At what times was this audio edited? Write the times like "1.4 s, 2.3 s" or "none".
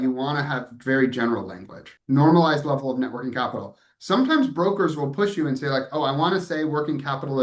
1.9 s